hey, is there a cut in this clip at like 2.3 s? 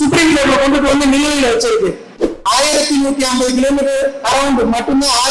yes; 1 cut; at 2.3 s

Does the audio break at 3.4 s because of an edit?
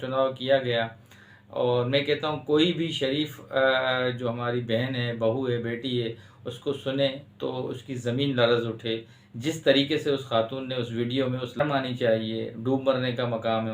no; 1 cut; at 11.6 s

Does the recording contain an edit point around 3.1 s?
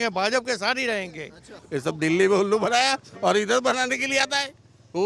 no; 1 cut; at 1.6 s

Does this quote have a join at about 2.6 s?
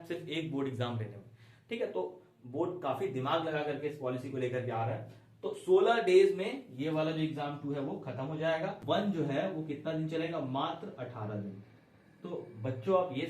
no; 1 cut; at 8.8 s

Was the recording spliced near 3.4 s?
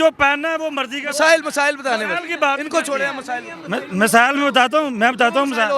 no; 0 cuts

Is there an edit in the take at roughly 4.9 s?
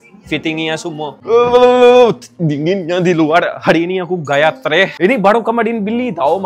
yes; 1 cut; at 4.9 s

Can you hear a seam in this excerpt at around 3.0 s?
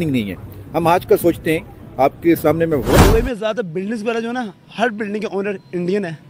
yes; 1 cut; at 3.0 s

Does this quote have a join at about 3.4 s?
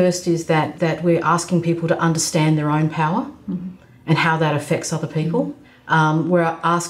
no; 0 cuts

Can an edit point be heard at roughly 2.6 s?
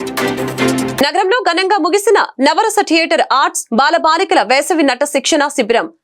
no; 1 cut; at 0.9 s

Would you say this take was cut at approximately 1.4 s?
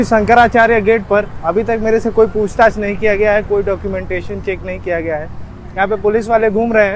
no; 0 cuts

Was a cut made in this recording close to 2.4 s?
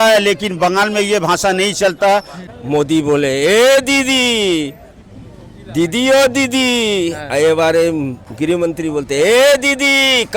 yes; 1 cut; at 2.4 s

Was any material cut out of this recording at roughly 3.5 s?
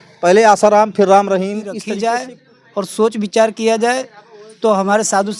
no; 1 cut; at 1.7 s

